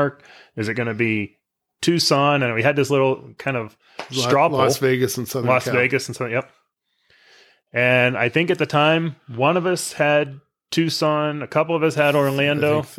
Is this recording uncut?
yes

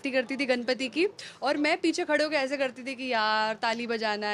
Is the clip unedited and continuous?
yes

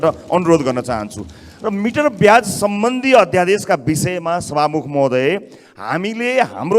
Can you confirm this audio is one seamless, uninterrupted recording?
yes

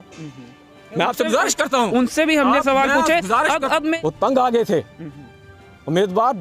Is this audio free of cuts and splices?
no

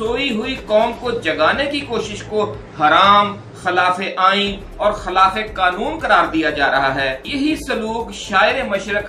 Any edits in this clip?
no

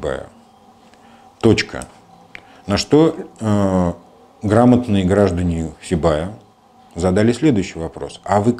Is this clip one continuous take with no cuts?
yes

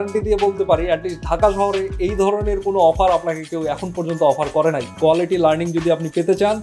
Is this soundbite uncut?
no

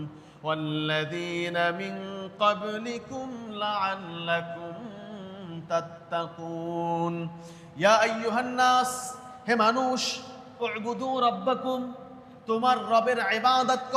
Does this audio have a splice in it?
no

